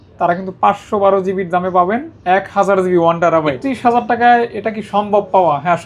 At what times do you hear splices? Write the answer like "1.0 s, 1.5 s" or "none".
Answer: 3.6 s